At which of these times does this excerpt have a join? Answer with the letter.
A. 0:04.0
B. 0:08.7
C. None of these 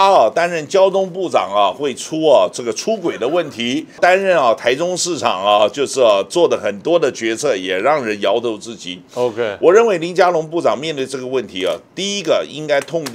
A